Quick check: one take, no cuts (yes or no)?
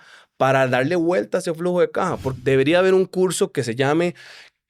no